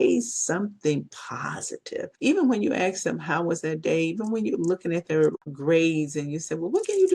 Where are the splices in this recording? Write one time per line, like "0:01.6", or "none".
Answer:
0:02.1
0:05.5

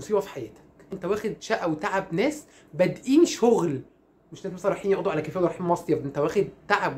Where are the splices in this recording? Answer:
0:00.9

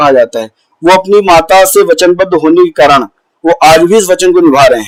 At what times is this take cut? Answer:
none

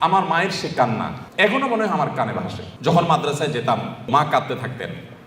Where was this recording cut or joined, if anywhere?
0:01.2
0:02.6
0:04.1

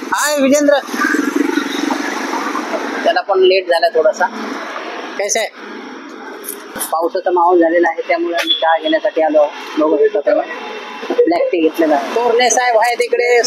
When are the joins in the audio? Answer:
0:06.8
0:12.1

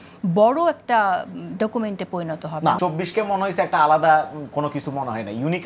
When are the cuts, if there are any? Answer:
0:02.8

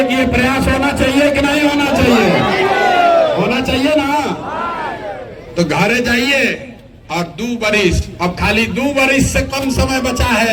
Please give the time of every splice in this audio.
none

